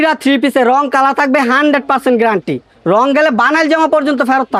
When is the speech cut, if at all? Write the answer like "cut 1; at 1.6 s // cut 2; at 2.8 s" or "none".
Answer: none